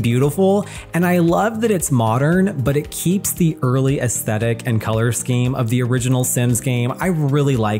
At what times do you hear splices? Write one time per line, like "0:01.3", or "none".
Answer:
none